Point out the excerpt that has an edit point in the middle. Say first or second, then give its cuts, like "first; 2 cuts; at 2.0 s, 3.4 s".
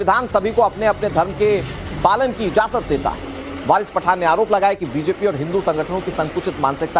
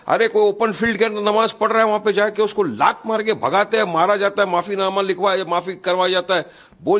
first; 1 cut; at 5.7 s